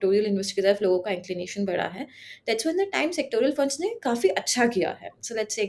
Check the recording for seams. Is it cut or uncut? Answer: uncut